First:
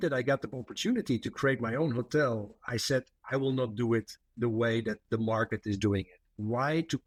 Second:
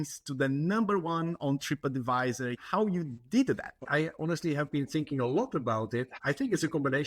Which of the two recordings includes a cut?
second; 3 cuts; at 2.6 s, 3.8 s, 6.2 s

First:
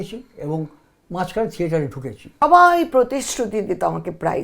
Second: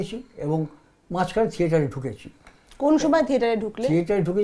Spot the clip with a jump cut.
first; 1 cut; at 2.2 s

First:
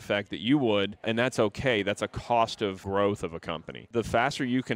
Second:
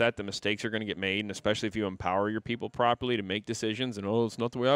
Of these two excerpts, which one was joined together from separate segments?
first; 3 cuts; at 1.1 s, 2.8 s, 3.7 s

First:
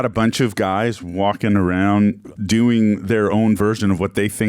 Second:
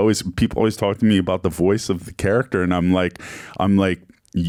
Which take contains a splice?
first; 1 cut; at 2.3 s

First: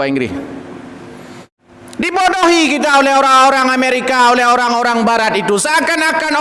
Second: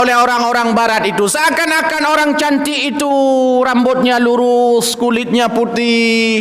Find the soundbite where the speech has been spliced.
first; 1 cut; at 1.5 s

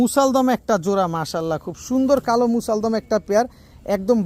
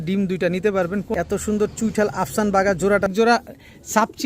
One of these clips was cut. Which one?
second; 2 cuts; at 1.1 s, 3.1 s

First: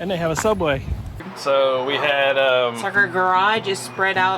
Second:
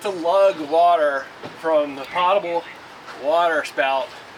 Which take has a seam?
first; 1 cut; at 1.3 s

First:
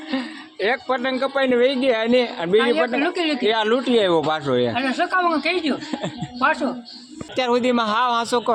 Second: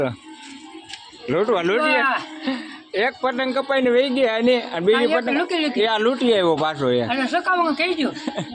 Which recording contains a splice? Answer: first; 1 cut; at 7.3 s

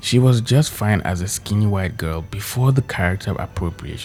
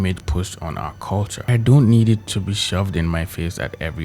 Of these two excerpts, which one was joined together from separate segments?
second; 1 cut; at 1.5 s

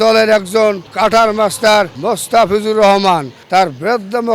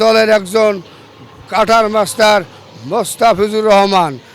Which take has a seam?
first; 3 cuts; at 0.9 s, 2.0 s, 3.3 s

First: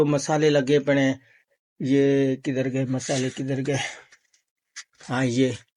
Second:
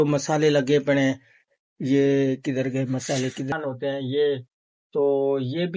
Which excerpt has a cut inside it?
second; 1 cut; at 3.5 s

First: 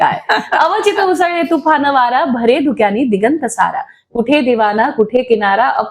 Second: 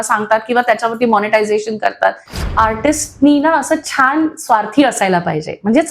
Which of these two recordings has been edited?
second; 1 cut; at 2.5 s

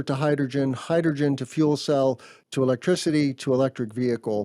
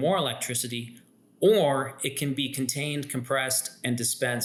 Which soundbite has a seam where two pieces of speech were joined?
first; 1 cut; at 2.3 s

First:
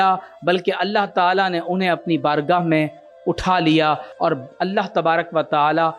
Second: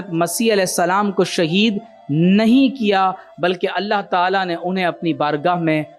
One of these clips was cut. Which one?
first; 1 cut; at 4.1 s

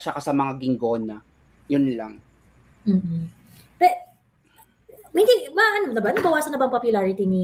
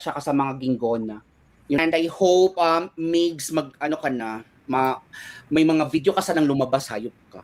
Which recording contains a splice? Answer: second; 1 cut; at 1.8 s

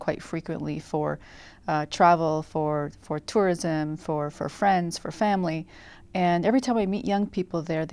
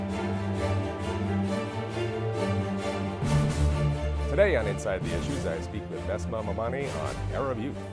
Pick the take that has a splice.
first; 1 cut; at 4.8 s

